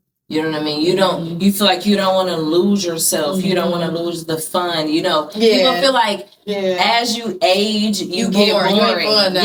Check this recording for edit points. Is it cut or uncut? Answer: uncut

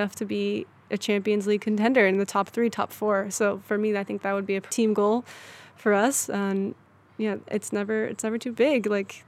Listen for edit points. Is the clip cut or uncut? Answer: cut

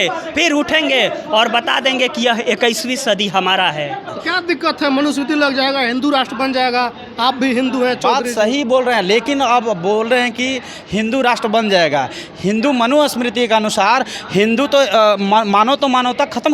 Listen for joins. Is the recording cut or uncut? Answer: cut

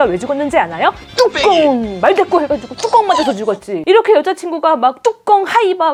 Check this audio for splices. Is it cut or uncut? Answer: uncut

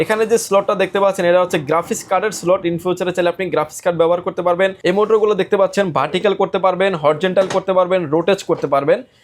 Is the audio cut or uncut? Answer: cut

